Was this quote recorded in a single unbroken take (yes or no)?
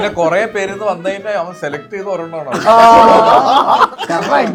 yes